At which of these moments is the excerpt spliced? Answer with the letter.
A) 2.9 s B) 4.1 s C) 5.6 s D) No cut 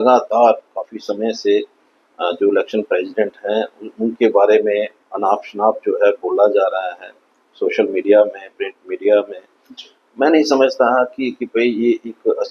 D